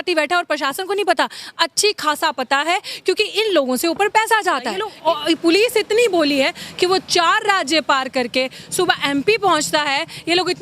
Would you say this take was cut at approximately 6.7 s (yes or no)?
no